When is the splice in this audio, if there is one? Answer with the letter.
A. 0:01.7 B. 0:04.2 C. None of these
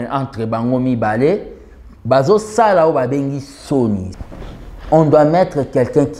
B